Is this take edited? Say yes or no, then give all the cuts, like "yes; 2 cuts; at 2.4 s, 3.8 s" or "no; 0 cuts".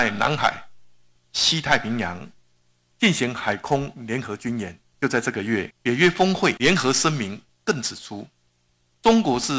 yes; 3 cuts; at 4.8 s, 5.7 s, 6.6 s